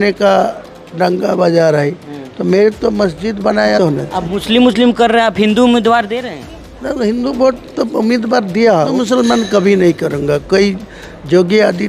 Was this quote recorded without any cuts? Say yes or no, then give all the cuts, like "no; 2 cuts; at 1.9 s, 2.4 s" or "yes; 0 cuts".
no; 2 cuts; at 3.8 s, 8.9 s